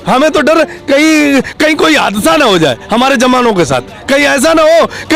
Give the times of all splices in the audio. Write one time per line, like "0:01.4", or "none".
none